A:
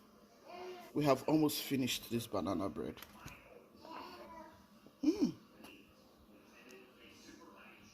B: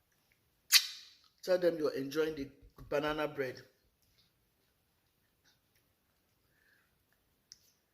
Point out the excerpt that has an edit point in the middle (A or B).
A